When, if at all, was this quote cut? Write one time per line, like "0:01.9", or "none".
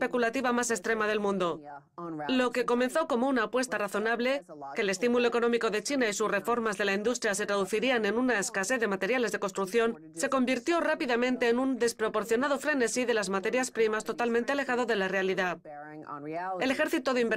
0:08.2